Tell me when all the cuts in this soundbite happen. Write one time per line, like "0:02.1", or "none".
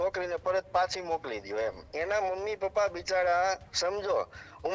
0:01.9